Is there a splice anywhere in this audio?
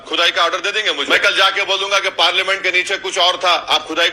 yes; 1 cut; at 1.0 s

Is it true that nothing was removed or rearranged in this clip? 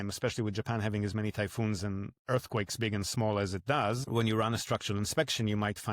no; 1 cut; at 4.0 s

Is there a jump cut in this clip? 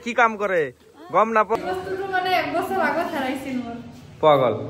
yes; 1 cut; at 1.6 s

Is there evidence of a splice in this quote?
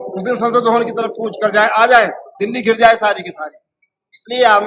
no; 0 cuts

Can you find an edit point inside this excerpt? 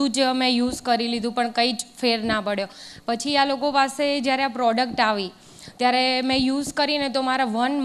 no; 0 cuts

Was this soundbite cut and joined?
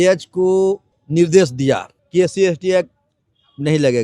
yes; 2 cuts; at 0.9 s, 1.9 s

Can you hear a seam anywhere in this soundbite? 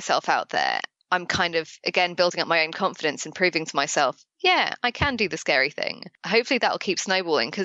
yes; 2 cuts; at 0.9 s, 6.1 s

